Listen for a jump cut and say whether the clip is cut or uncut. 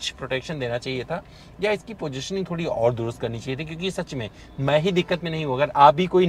uncut